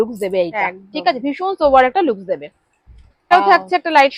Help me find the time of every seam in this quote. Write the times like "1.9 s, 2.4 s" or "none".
none